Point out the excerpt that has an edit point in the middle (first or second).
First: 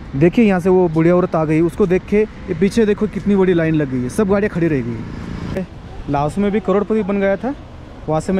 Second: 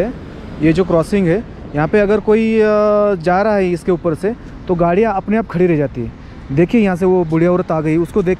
first